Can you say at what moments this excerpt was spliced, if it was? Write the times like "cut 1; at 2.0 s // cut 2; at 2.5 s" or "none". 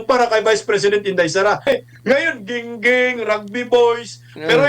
cut 1; at 1.7 s

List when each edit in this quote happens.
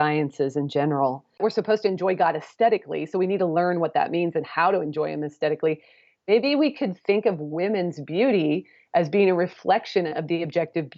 cut 1; at 1.4 s

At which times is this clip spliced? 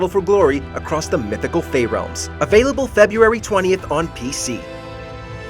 cut 1; at 2.2 s // cut 2; at 4.6 s

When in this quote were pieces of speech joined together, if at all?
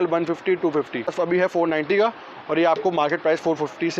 cut 1; at 1.1 s

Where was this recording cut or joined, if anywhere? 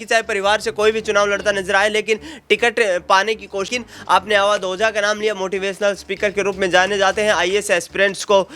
cut 1; at 3.8 s

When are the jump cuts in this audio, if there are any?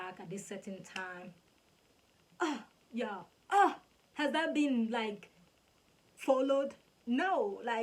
none

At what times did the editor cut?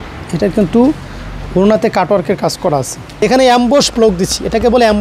cut 1; at 3.0 s

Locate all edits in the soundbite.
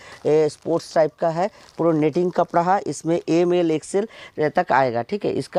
none

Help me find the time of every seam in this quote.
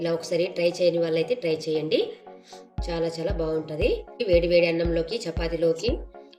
cut 1; at 4.1 s

